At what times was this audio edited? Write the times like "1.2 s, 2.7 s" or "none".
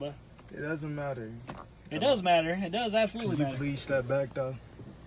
none